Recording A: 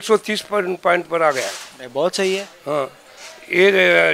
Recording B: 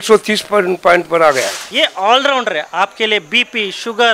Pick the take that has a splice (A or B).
B